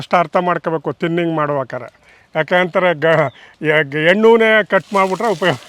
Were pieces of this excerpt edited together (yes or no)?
no